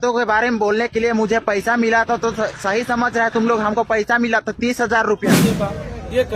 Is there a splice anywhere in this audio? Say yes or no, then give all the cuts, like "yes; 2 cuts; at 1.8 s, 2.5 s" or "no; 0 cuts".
yes; 1 cut; at 5.4 s